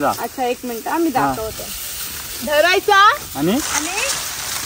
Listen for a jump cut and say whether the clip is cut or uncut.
uncut